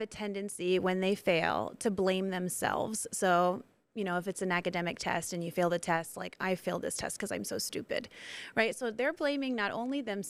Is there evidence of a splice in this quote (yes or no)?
no